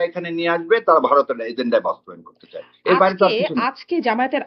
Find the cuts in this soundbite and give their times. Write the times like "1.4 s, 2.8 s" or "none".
none